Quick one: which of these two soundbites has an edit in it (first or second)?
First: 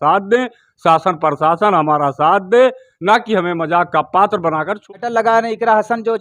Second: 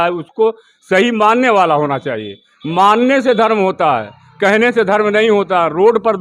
first